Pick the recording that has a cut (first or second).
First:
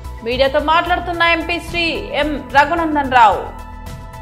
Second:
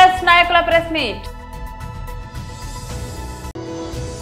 second